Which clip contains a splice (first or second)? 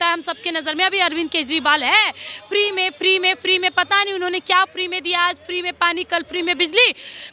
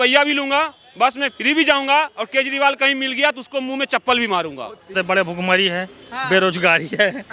second